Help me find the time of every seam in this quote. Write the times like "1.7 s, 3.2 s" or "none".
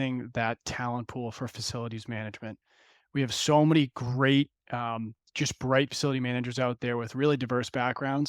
none